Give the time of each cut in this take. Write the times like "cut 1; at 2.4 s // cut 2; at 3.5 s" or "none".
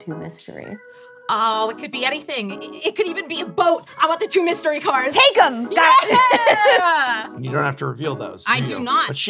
none